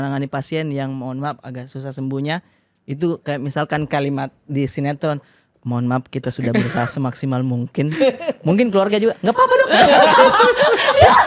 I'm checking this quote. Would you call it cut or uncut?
uncut